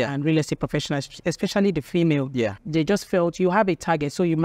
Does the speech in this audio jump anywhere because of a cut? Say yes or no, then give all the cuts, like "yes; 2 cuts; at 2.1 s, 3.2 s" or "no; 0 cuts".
yes; 1 cut; at 2.6 s